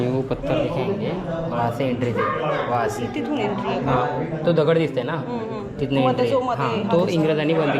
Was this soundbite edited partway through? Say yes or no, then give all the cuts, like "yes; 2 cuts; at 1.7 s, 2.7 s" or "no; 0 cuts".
no; 0 cuts